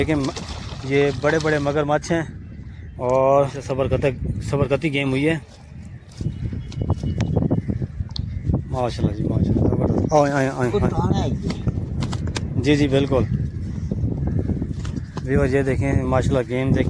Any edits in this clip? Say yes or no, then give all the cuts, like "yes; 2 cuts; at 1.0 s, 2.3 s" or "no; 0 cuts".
yes; 1 cut; at 3.6 s